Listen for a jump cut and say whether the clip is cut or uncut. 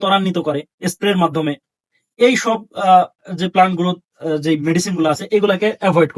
uncut